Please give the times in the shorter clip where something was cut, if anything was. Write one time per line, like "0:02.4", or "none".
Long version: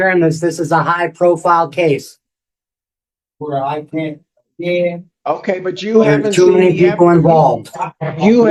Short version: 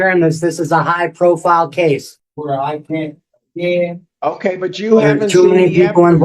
0:02.2

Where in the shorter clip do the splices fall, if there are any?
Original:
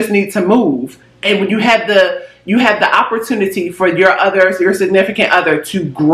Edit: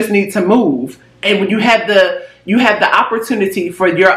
none

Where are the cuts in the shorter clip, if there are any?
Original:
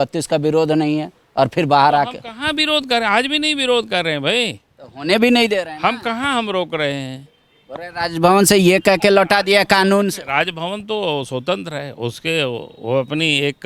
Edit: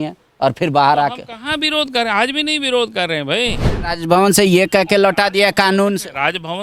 0:03.7

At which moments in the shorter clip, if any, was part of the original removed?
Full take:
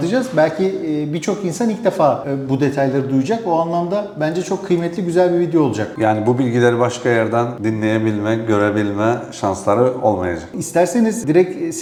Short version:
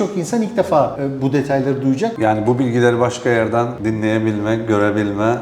0:02.1

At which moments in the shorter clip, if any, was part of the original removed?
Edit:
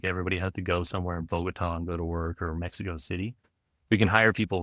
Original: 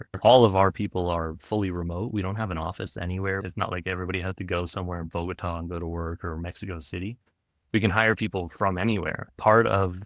none

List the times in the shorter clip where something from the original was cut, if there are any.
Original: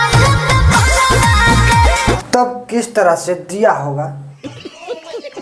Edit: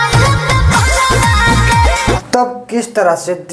none

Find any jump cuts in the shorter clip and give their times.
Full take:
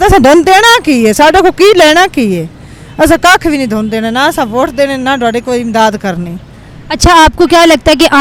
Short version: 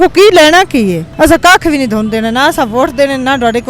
0:01.0

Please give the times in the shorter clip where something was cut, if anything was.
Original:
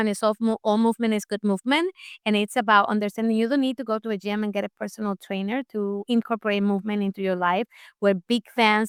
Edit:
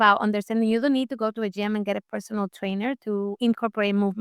none

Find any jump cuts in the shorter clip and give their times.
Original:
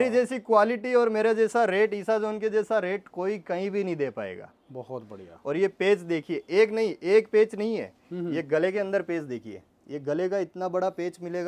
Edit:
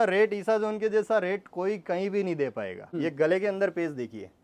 0:02.9

